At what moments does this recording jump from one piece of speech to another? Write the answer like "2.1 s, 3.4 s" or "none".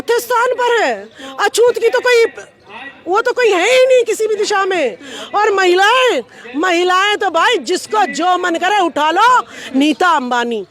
9.7 s